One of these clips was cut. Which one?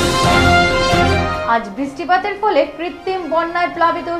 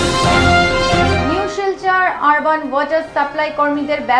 second; 1 cut; at 1.0 s

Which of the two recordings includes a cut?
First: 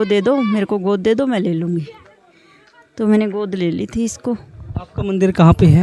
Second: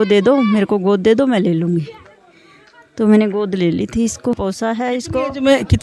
second; 1 cut; at 4.4 s

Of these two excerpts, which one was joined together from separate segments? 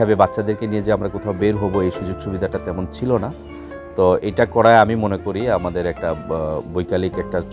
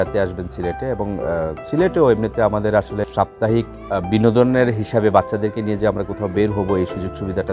second; 2 cuts; at 3.0 s, 3.8 s

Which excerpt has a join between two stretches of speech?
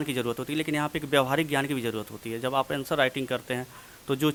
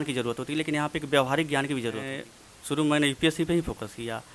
second; 1 cut; at 2.2 s

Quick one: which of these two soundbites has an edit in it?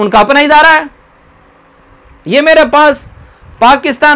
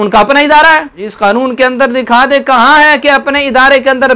second; 1 cut; at 1.0 s

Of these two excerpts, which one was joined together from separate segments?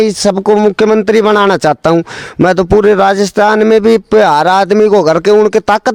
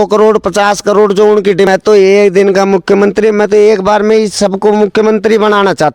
second; 1 cut; at 1.7 s

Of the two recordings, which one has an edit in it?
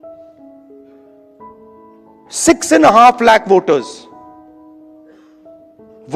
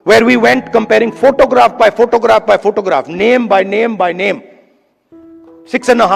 first; 1 cut; at 2.4 s

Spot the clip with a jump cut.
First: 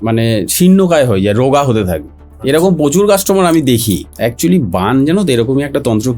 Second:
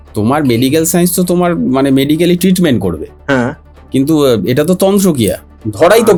first; 1 cut; at 4.1 s

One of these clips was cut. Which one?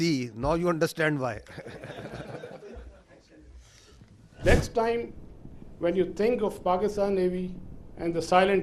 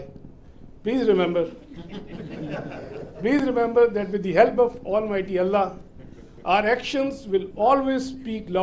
first; 1 cut; at 4.4 s

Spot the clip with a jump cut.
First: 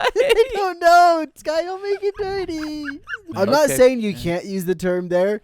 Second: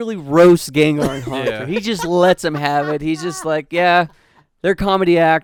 first; 1 cut; at 3.2 s

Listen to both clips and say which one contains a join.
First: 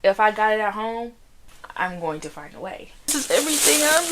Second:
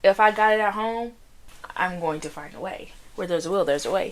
first; 1 cut; at 3.1 s

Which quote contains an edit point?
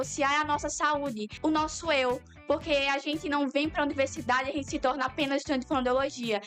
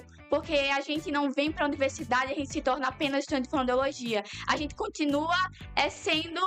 first; 1 cut; at 1.3 s

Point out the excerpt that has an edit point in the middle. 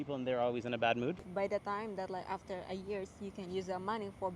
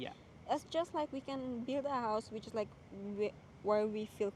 first; 1 cut; at 1.2 s

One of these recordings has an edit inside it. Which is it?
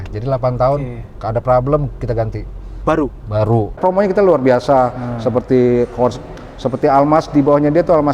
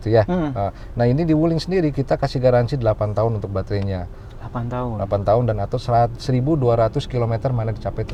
first; 1 cut; at 3.8 s

